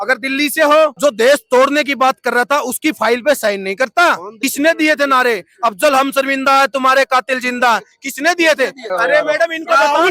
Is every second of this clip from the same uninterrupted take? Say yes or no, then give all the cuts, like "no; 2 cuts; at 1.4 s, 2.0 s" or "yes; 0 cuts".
no; 3 cuts; at 0.9 s, 4.3 s, 8.8 s